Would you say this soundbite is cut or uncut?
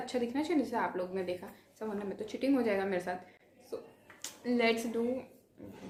uncut